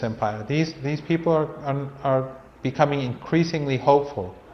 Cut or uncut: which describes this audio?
uncut